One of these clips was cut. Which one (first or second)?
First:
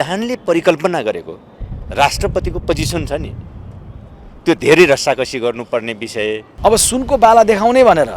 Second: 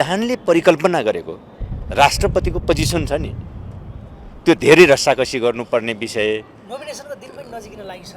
first